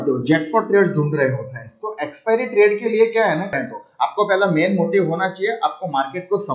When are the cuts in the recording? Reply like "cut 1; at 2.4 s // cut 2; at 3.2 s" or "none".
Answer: cut 1; at 3.6 s